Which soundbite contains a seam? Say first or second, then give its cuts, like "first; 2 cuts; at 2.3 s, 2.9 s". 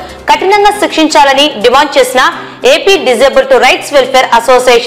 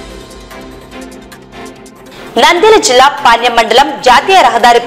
second; 1 cut; at 1.8 s